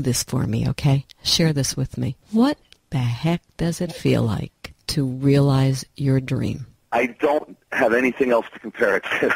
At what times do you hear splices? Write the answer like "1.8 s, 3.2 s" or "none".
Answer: none